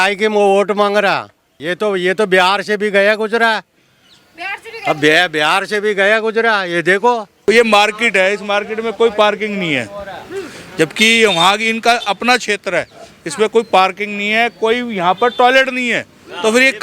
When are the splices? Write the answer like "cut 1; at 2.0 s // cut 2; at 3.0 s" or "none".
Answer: cut 1; at 1.6 s // cut 2; at 7.3 s